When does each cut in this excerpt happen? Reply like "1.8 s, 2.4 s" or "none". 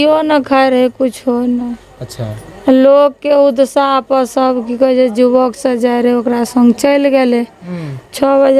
none